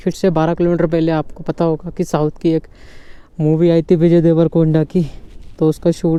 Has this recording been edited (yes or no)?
no